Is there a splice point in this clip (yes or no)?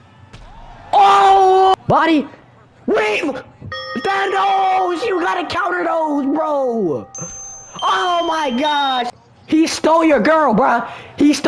yes